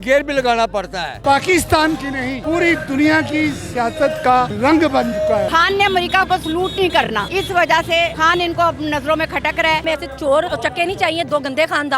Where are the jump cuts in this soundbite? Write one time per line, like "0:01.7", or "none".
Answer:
0:01.1
0:02.4
0:04.5
0:05.5
0:07.3
0:08.1
0:09.8
0:10.5